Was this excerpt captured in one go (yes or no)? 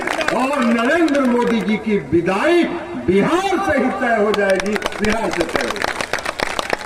yes